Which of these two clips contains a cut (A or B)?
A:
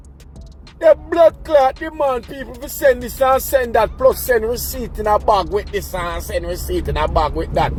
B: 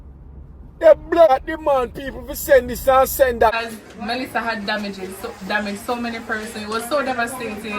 B